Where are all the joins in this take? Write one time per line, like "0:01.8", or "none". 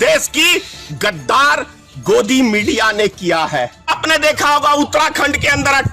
0:04.0